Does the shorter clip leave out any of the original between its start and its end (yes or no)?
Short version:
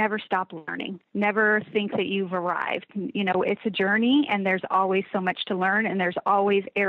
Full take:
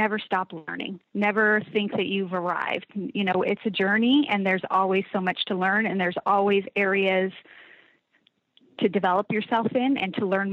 no